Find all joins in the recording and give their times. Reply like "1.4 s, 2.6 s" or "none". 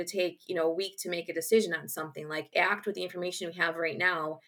2.5 s